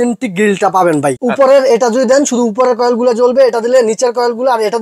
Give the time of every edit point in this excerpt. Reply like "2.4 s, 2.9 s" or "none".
1.2 s